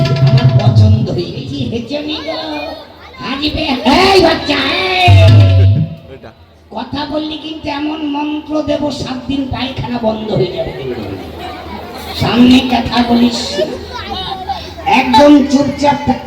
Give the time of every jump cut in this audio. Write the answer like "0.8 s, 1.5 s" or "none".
1.5 s